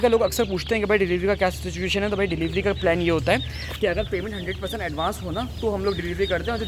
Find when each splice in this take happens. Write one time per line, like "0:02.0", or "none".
none